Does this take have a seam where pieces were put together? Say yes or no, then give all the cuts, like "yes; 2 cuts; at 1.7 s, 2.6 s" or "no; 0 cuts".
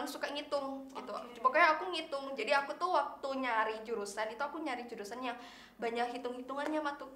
no; 0 cuts